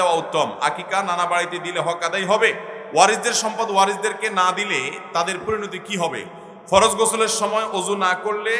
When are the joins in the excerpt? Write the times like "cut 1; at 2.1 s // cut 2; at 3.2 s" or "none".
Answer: cut 1; at 2.7 s // cut 2; at 6.3 s